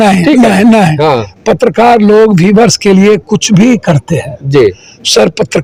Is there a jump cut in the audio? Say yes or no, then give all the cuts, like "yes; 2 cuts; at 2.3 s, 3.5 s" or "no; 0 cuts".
no; 0 cuts